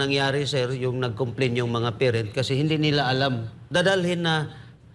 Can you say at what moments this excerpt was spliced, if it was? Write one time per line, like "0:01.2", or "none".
0:03.6